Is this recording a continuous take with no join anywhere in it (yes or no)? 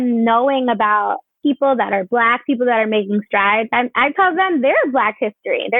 no